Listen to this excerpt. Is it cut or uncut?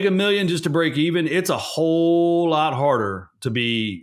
uncut